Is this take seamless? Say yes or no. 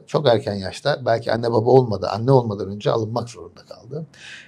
yes